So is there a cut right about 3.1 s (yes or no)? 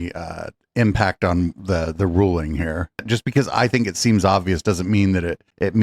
yes